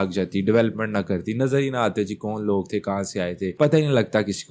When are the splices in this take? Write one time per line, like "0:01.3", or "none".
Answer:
0:03.5